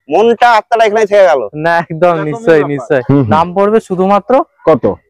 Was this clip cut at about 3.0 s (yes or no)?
yes